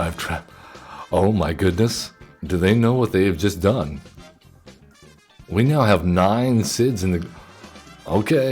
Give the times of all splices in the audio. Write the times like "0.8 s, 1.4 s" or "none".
none